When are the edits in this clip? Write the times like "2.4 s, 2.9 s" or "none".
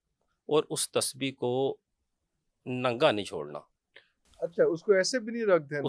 none